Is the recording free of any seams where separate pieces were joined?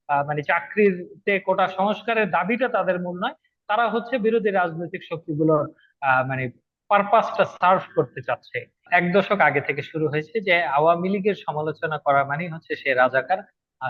no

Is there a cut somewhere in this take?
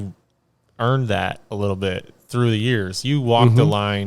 no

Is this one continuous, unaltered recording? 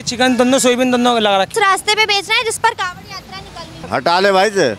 no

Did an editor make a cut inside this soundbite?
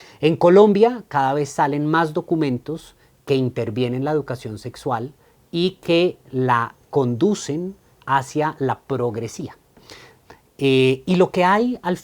no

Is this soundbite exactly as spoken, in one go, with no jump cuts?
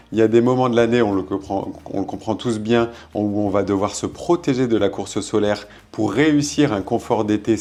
yes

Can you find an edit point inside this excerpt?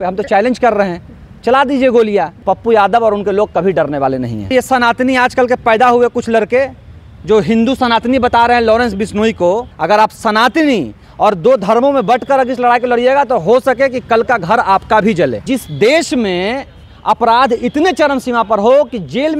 yes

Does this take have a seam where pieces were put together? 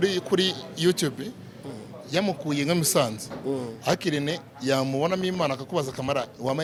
no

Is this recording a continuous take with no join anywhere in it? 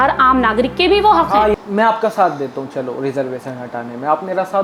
no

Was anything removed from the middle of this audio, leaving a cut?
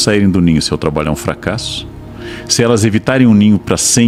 no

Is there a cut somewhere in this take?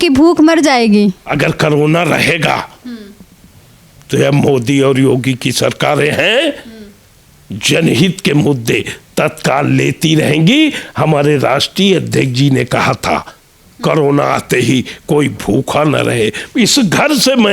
no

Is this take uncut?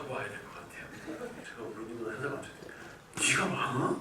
no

